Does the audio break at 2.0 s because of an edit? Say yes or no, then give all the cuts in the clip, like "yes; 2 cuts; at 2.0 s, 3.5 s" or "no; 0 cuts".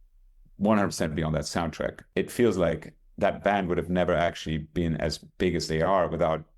yes; 1 cut; at 2.0 s